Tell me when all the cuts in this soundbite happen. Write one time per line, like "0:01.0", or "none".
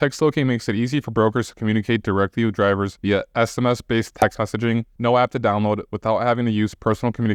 none